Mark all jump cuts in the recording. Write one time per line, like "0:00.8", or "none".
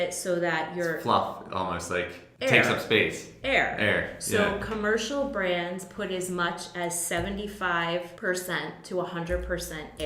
0:02.2
0:08.1